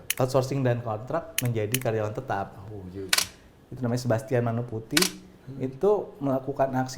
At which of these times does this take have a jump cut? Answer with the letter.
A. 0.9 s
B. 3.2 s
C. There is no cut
B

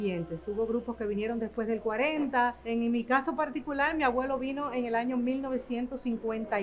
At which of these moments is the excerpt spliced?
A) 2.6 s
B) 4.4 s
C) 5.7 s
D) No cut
A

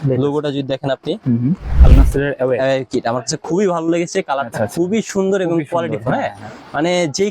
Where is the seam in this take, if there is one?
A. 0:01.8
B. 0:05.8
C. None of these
A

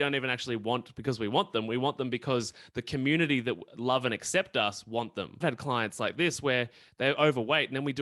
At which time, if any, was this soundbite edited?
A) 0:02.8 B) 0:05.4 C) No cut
B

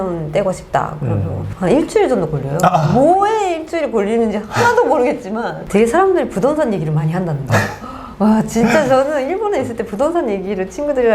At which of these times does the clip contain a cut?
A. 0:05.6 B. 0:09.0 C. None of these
A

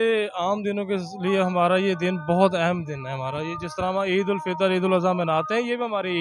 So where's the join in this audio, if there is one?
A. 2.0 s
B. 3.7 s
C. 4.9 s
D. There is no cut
D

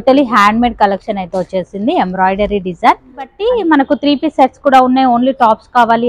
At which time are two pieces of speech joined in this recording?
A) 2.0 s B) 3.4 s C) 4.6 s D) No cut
B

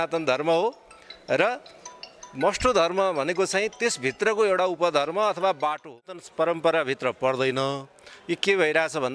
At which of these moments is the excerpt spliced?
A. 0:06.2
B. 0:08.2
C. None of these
A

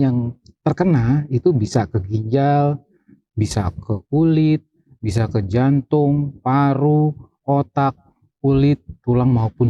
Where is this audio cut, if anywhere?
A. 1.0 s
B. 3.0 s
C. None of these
C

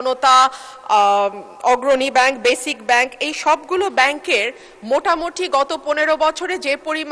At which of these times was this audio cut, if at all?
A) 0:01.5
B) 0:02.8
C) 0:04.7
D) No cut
D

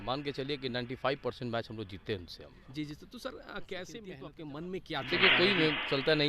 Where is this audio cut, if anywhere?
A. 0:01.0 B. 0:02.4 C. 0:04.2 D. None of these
C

